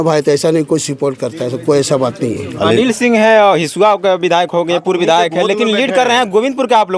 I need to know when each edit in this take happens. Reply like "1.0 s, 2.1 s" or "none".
2.5 s